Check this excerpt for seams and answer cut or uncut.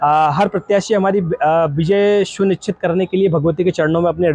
uncut